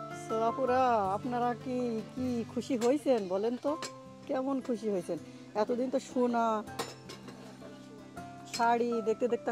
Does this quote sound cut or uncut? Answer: uncut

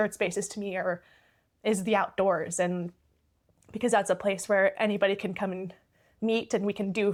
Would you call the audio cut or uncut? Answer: uncut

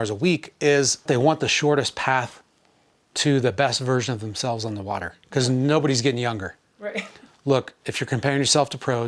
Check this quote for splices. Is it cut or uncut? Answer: cut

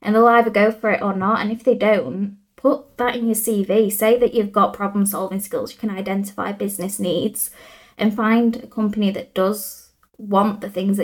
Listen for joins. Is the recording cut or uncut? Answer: uncut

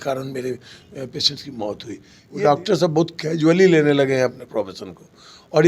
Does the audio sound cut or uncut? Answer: cut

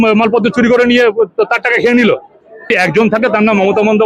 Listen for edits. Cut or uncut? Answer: cut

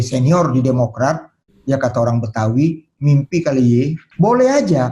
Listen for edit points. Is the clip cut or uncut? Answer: cut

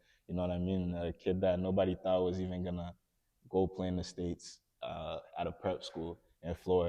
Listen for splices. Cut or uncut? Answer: uncut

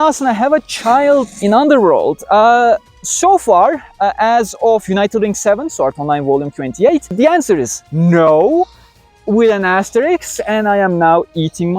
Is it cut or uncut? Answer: uncut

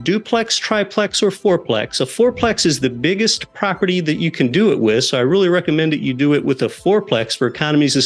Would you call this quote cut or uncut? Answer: uncut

